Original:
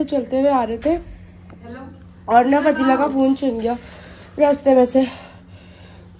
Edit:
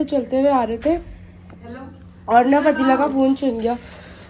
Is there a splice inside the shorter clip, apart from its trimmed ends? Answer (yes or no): no